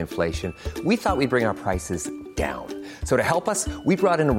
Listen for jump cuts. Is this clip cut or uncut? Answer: uncut